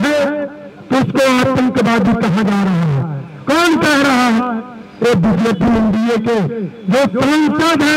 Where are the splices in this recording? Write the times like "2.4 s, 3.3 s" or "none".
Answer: none